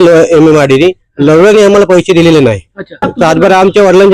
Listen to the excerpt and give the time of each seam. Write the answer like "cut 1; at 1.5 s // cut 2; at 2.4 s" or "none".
cut 1; at 3.1 s

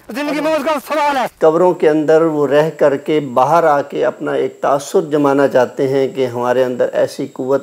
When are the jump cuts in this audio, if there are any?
cut 1; at 1.3 s

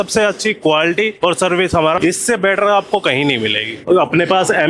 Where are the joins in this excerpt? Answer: cut 1; at 1.1 s // cut 2; at 2.0 s // cut 3; at 3.8 s

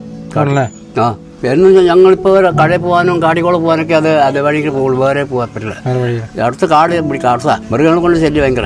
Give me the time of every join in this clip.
cut 1; at 1.3 s // cut 2; at 7.6 s

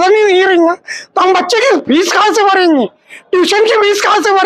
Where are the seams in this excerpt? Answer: none

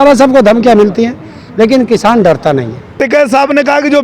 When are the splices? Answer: cut 1; at 3.0 s

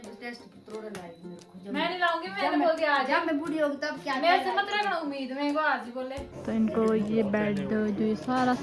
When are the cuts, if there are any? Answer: cut 1; at 6.3 s

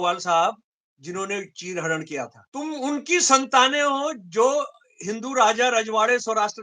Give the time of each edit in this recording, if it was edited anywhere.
cut 1; at 2.4 s

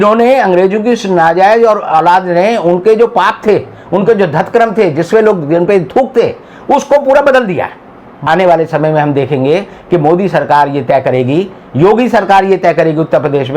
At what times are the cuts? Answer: cut 1; at 8.3 s

